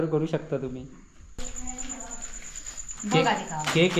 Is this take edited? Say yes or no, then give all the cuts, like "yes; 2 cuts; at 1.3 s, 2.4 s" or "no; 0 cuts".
yes; 1 cut; at 1.5 s